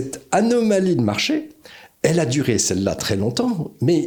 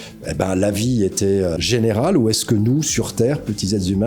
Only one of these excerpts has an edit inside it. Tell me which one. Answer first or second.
second